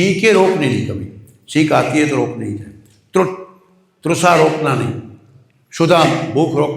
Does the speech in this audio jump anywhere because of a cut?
no; 0 cuts

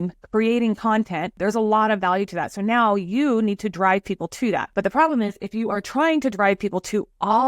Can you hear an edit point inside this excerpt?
yes; 2 cuts; at 1.3 s, 4.7 s

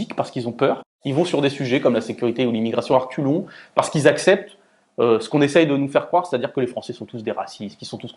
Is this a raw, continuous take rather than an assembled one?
no; 1 cut; at 1.0 s

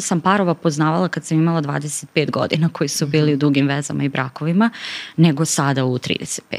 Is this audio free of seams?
yes; 0 cuts

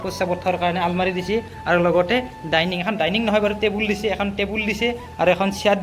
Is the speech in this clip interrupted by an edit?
no; 0 cuts

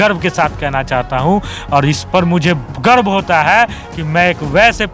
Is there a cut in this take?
no; 0 cuts

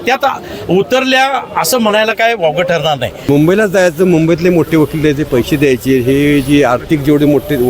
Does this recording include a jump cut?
yes; 1 cut; at 3.2 s

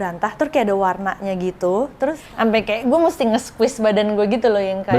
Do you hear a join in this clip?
yes; 1 cut; at 2.2 s

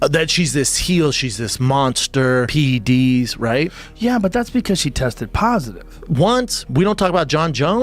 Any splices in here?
yes; 1 cut; at 2.5 s

